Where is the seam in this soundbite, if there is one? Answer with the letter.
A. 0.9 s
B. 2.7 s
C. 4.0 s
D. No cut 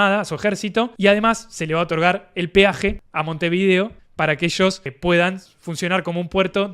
A